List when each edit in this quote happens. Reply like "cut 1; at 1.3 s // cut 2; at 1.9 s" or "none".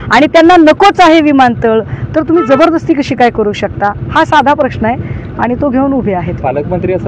none

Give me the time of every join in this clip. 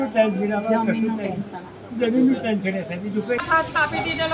cut 1; at 3.4 s

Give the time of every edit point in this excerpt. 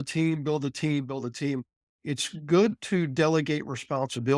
cut 1; at 2.0 s

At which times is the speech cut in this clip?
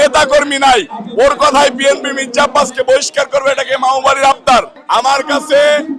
cut 1; at 4.8 s

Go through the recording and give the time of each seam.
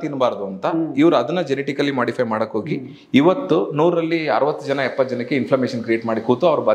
none

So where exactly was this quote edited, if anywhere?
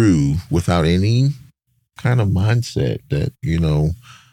none

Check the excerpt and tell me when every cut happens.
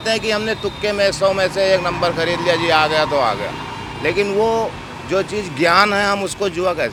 none

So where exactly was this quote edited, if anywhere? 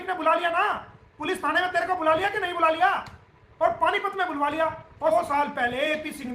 cut 1; at 5.1 s

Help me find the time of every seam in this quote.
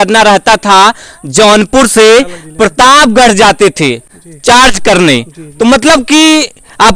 none

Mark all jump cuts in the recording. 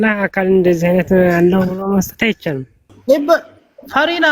cut 1; at 2.9 s

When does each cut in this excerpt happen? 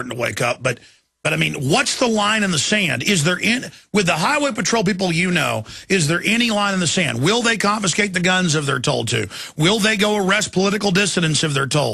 cut 1; at 10.2 s

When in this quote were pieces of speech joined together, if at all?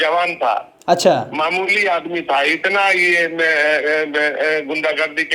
none

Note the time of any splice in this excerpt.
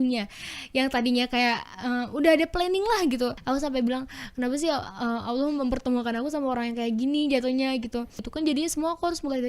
cut 1; at 3.4 s // cut 2; at 8.3 s

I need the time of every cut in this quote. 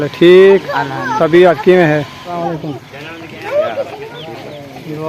cut 1; at 2.4 s

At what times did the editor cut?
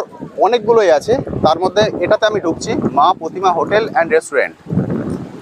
none

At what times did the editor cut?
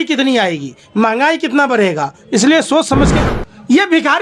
cut 1; at 3.2 s

